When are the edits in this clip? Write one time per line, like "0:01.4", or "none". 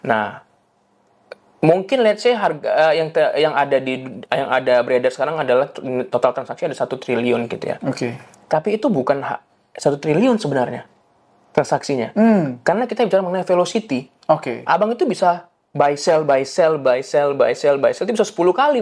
none

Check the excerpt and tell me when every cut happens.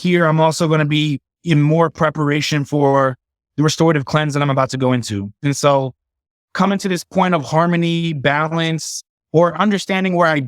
0:05.3

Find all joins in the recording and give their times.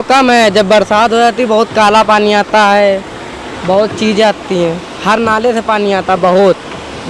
none

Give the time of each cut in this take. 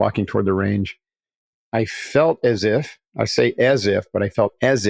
0:01.5

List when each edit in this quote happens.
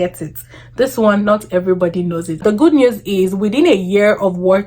0:02.4

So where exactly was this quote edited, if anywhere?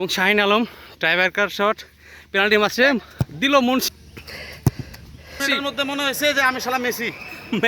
0:03.9
0:05.4

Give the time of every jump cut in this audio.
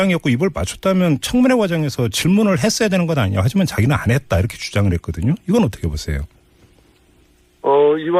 none

